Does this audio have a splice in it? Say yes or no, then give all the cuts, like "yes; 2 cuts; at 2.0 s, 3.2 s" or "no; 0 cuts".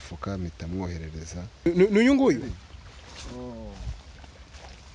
yes; 1 cut; at 1.7 s